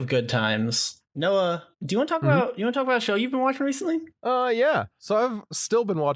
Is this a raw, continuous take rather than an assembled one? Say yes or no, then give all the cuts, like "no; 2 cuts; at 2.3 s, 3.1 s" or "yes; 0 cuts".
yes; 0 cuts